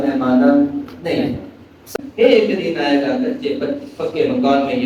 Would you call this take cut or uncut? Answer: cut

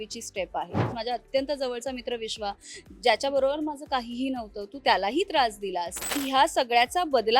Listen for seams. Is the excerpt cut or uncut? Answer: cut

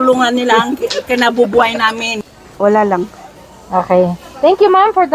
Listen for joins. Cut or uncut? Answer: cut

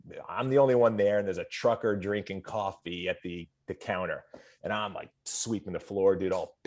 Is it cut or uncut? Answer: uncut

